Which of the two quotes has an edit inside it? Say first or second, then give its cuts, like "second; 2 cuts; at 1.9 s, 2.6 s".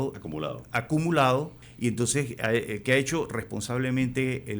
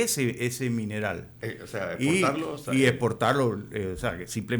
first; 1 cut; at 1.6 s